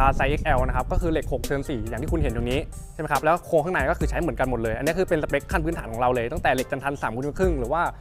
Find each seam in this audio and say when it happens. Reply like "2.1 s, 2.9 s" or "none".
none